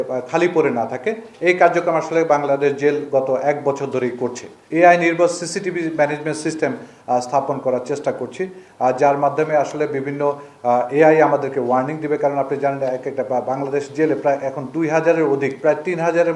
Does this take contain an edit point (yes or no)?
yes